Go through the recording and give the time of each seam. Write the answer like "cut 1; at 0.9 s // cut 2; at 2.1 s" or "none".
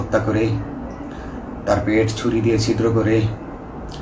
none